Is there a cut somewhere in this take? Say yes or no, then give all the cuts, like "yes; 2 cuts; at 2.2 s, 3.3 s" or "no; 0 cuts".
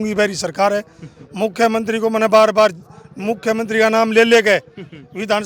no; 0 cuts